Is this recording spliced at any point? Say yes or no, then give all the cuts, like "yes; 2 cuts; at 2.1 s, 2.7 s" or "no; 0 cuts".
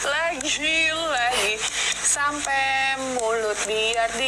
no; 0 cuts